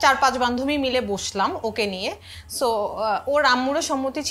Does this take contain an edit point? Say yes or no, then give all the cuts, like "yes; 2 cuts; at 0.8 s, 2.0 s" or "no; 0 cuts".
no; 0 cuts